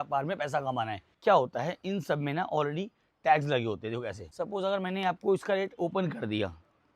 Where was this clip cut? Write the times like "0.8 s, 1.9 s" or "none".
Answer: 1.0 s, 4.2 s